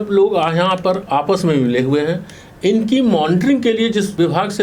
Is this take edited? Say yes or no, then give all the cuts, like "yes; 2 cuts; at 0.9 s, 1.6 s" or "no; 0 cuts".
no; 0 cuts